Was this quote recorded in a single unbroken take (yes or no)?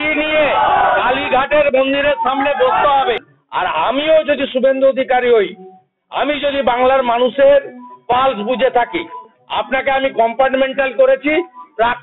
no